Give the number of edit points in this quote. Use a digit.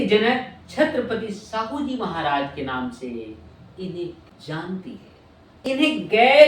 2